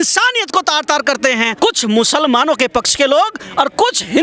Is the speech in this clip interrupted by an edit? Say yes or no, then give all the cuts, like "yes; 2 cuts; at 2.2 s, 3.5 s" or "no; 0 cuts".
no; 0 cuts